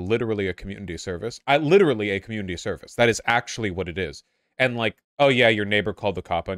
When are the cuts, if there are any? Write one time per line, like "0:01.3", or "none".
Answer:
0:05.0